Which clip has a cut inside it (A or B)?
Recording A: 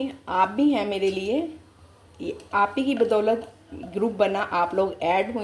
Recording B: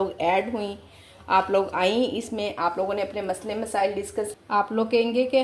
B